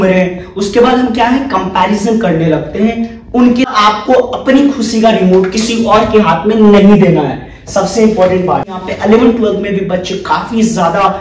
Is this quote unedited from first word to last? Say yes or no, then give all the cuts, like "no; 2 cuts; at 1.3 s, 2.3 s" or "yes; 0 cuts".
no; 2 cuts; at 3.7 s, 8.8 s